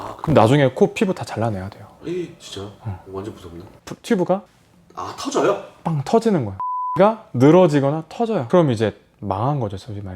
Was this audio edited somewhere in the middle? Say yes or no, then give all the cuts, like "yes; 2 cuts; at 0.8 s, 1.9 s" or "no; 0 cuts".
yes; 2 cuts; at 3.6 s, 6.9 s